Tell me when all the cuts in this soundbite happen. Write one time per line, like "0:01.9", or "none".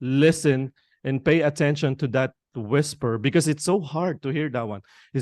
none